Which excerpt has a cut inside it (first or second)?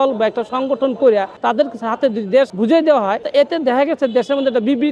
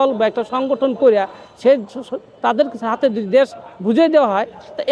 first